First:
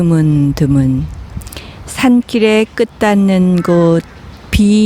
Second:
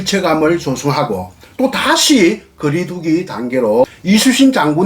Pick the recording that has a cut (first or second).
second